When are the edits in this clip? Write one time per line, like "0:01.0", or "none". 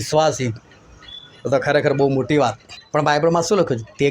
0:02.7